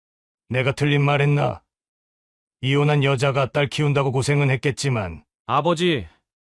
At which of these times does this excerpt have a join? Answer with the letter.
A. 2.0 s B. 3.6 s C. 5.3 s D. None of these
D